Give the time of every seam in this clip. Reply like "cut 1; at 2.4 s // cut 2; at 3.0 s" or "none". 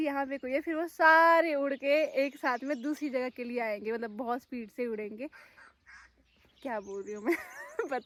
none